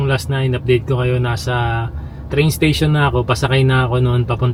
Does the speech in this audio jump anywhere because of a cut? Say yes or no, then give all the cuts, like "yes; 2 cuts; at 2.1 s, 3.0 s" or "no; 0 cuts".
no; 0 cuts